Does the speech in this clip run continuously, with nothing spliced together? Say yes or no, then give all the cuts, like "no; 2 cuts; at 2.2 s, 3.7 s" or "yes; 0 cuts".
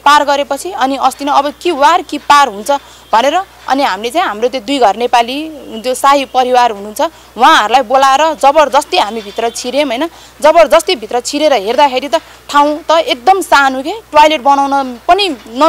yes; 0 cuts